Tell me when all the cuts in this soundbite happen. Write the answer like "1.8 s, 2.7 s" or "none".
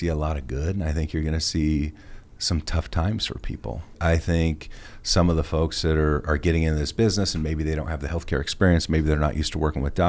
4.0 s